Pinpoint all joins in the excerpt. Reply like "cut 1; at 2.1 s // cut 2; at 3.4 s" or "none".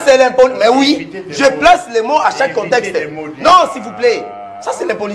none